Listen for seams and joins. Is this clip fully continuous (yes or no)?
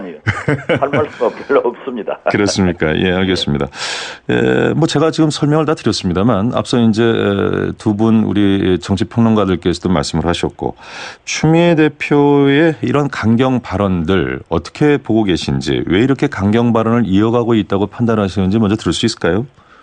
yes